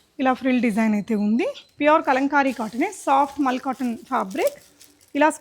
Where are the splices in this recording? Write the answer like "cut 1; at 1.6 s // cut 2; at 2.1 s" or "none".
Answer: cut 1; at 1.6 s